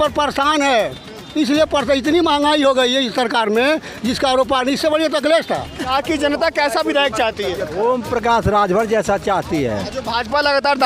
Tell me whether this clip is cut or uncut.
cut